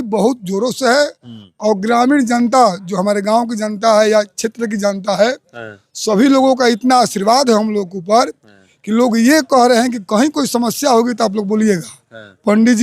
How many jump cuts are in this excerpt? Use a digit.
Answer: 0